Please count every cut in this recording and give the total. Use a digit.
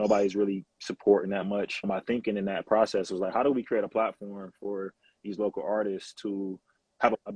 1